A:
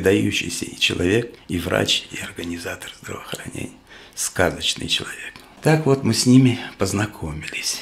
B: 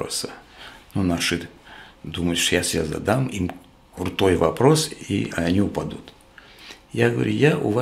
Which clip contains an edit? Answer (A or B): A